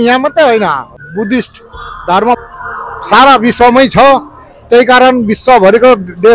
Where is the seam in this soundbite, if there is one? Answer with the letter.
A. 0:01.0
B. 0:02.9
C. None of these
A